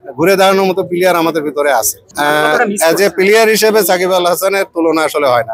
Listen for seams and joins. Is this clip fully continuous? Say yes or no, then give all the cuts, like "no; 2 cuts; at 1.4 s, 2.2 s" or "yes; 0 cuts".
no; 1 cut; at 2.0 s